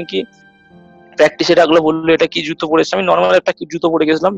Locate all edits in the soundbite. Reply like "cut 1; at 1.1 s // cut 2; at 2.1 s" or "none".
none

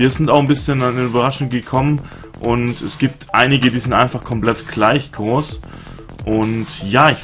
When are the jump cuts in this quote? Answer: cut 1; at 5.1 s

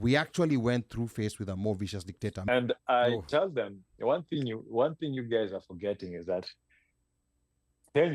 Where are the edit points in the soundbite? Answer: cut 1; at 2.5 s

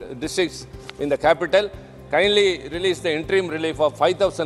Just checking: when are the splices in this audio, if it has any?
none

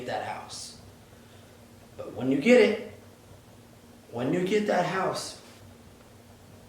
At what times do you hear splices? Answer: cut 1; at 5.6 s

